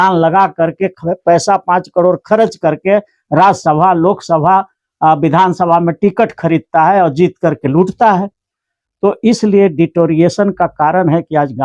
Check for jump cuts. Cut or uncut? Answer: uncut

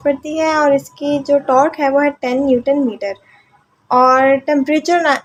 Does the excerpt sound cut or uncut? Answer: uncut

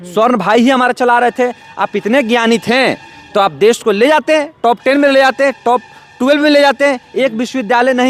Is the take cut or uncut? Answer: uncut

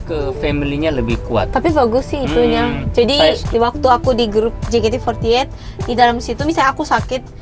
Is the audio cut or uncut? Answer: cut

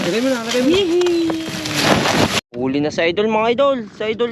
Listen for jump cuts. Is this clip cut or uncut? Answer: cut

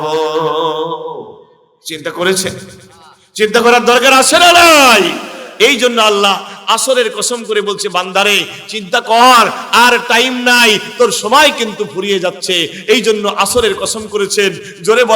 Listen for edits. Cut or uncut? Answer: uncut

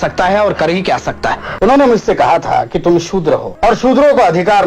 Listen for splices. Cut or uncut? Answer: cut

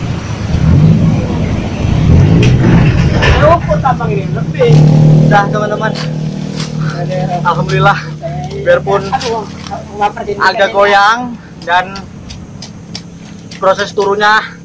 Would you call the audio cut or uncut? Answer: cut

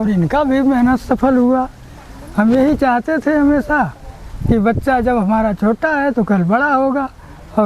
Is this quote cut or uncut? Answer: uncut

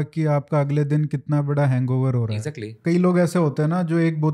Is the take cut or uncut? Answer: cut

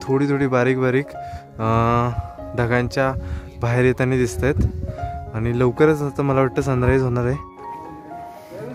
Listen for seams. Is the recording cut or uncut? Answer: uncut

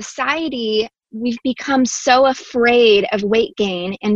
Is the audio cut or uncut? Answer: cut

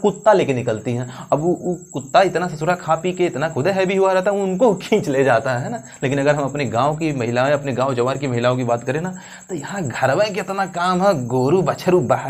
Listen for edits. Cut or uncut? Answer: uncut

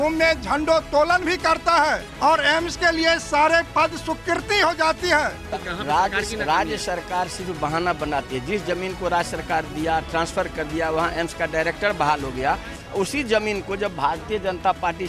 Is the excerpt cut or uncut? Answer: cut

